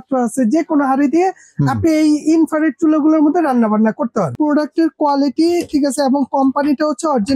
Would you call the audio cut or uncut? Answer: cut